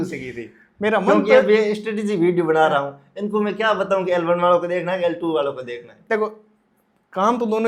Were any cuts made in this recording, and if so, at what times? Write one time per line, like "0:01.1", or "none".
none